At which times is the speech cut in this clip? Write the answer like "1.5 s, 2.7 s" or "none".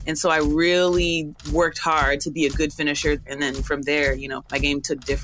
3.2 s, 4.4 s